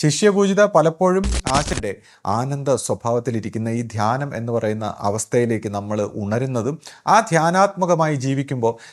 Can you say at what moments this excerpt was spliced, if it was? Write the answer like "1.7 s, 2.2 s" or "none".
1.7 s